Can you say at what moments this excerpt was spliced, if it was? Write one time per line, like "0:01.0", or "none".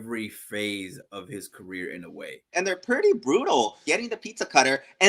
0:02.5
0:03.8